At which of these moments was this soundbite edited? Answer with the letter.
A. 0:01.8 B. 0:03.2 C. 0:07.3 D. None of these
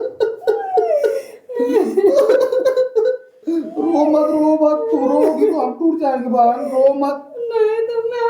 D